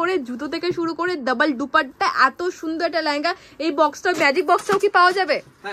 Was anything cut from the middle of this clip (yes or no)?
no